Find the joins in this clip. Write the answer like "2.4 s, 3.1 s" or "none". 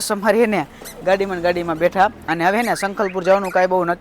2.2 s

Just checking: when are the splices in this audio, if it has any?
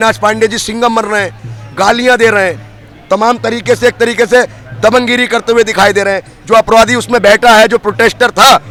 none

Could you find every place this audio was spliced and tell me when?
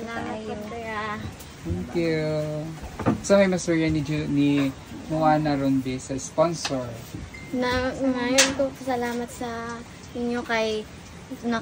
none

